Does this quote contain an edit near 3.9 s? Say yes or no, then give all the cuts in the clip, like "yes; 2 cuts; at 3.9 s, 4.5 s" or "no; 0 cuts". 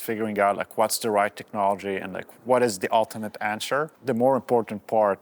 yes; 2 cuts; at 2.2 s, 3.9 s